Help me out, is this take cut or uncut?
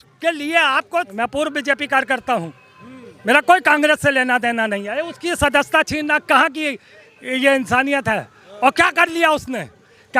cut